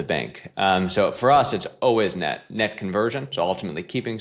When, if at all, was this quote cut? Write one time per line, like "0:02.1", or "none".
none